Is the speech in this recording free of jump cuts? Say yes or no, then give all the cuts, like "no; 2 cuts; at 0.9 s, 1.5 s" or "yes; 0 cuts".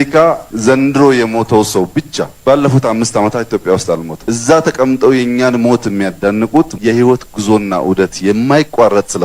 yes; 0 cuts